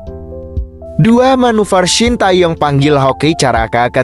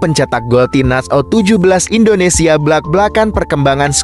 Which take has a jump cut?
first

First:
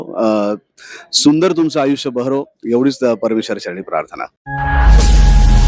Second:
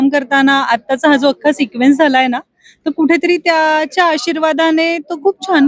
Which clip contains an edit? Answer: first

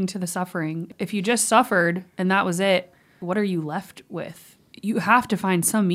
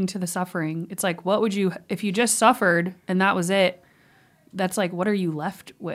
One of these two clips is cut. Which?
first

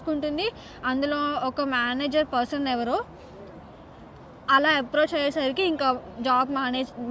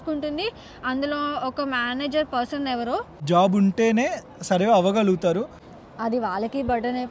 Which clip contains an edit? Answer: second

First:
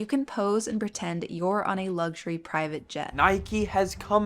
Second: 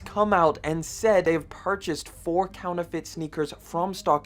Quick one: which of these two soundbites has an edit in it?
first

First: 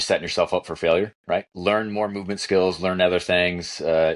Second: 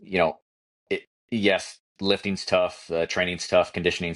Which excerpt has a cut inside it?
first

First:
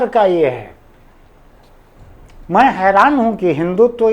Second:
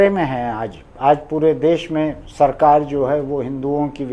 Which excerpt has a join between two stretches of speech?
first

